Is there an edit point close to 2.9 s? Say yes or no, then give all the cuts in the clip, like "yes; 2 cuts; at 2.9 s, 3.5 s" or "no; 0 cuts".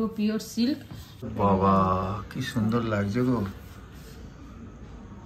no; 1 cut; at 1.3 s